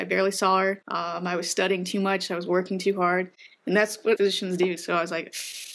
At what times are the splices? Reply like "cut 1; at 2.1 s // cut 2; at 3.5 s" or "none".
cut 1; at 0.9 s // cut 2; at 4.2 s